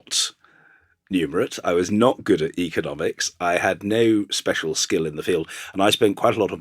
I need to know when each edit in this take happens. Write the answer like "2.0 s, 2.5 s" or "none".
5.6 s